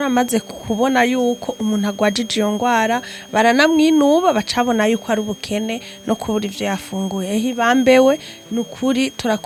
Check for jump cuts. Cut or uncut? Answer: uncut